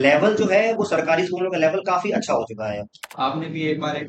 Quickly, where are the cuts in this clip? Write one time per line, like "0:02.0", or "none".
0:03.0